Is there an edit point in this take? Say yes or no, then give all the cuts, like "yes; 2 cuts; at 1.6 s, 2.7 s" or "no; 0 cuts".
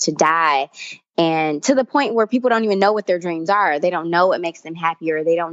no; 0 cuts